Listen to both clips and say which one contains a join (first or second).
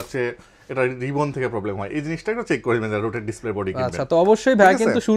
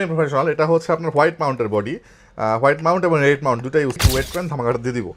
second